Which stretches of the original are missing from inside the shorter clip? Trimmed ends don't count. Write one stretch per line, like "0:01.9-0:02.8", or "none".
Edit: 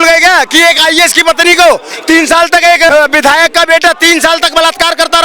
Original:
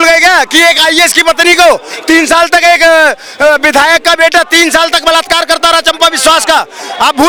0:02.9-0:03.4